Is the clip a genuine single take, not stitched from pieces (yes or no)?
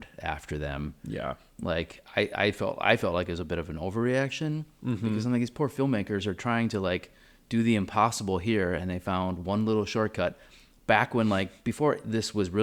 yes